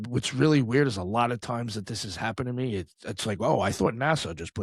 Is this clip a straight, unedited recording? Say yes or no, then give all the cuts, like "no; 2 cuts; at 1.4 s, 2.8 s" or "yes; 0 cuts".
yes; 0 cuts